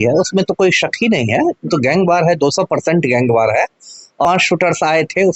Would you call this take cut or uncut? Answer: cut